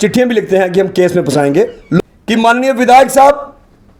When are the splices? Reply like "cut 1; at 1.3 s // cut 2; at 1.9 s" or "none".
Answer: cut 1; at 2.0 s